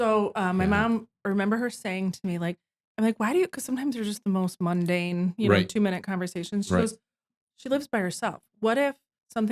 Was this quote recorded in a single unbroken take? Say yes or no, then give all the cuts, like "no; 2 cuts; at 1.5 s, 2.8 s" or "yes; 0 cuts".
yes; 0 cuts